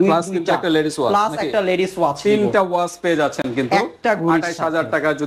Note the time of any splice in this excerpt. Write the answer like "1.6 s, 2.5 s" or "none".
none